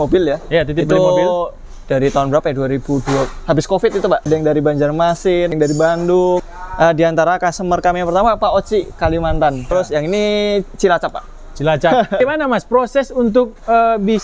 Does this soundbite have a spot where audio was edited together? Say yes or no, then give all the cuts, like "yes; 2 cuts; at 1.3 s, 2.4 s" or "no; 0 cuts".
yes; 5 cuts; at 4.3 s, 5.5 s, 6.5 s, 9.7 s, 12.2 s